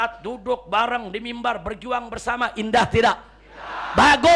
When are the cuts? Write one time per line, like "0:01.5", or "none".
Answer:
none